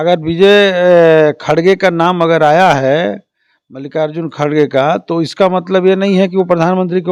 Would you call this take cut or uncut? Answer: uncut